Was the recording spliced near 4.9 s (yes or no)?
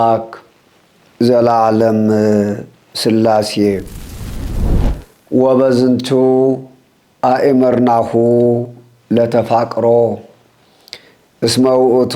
yes